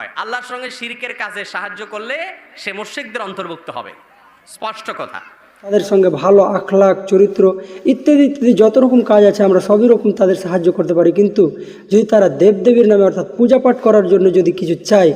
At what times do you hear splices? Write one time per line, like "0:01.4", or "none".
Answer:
0:05.7